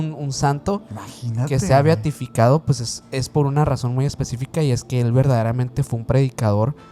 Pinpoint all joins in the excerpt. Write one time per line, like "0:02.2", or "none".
none